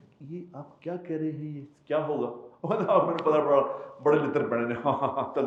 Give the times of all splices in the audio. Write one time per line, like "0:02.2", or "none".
none